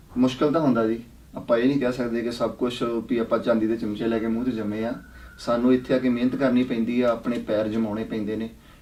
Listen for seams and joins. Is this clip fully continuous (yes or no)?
yes